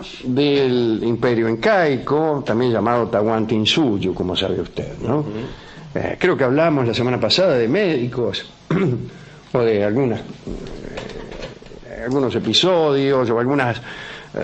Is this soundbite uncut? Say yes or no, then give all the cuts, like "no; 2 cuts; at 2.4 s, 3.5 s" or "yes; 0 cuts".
yes; 0 cuts